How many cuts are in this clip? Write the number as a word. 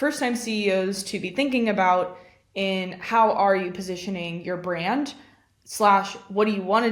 zero